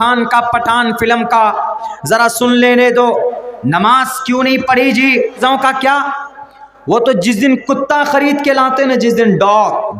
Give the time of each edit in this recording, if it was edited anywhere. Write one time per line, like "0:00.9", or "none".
0:05.4